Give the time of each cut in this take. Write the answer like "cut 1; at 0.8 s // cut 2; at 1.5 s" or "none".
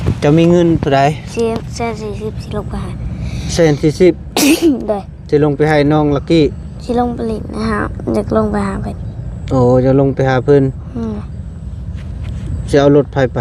none